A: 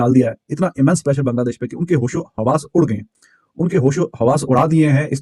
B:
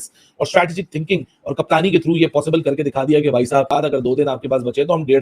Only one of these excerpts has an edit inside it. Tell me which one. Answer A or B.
B